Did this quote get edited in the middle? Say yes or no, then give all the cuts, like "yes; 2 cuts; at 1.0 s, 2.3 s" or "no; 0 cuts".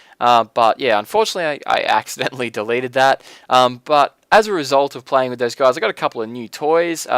yes; 1 cut; at 3.9 s